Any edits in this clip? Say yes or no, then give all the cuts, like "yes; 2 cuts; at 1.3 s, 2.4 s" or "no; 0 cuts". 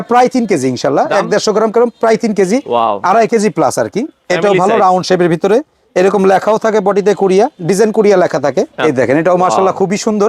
yes; 2 cuts; at 2.7 s, 8.7 s